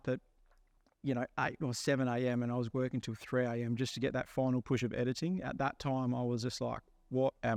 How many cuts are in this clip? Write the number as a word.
zero